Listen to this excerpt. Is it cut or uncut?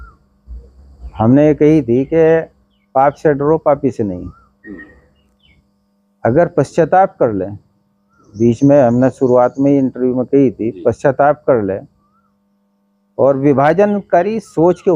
uncut